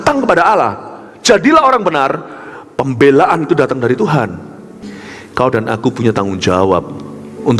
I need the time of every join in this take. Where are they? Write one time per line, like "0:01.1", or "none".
0:04.8